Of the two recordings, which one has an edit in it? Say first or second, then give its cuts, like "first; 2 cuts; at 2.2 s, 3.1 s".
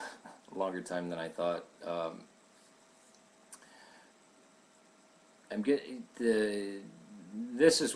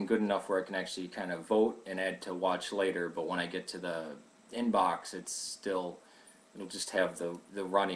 second; 1 cut; at 6.0 s